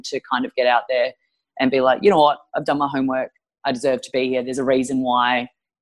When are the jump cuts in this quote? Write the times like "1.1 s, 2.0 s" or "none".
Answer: none